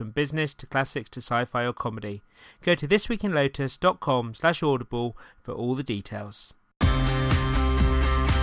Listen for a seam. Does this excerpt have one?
yes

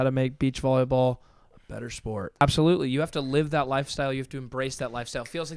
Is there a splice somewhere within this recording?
yes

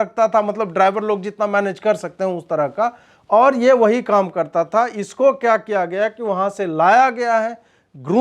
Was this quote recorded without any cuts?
yes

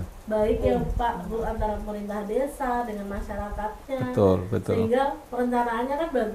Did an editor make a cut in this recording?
no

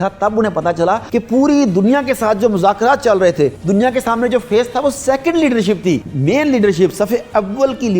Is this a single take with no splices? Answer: no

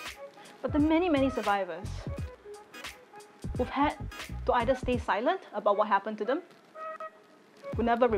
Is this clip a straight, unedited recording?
no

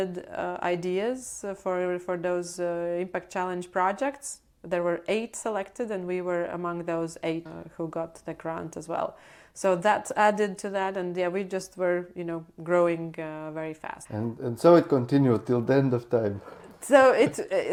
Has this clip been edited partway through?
no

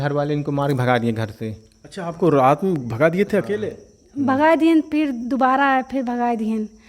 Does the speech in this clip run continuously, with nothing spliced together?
yes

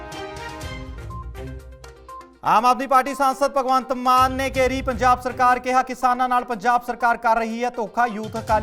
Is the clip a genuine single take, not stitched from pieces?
yes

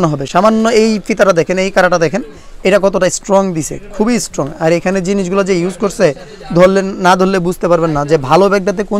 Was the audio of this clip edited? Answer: no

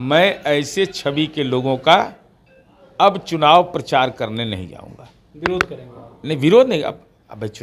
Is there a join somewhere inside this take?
no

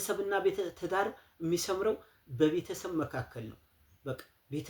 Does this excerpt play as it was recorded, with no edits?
yes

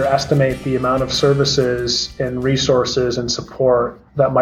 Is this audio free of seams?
yes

